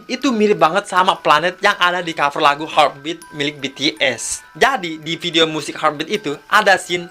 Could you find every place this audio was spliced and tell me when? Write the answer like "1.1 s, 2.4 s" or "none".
4.4 s